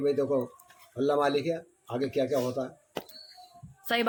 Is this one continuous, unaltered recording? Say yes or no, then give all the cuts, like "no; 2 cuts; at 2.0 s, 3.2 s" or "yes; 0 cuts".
yes; 0 cuts